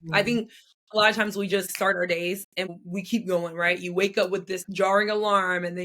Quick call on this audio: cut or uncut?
cut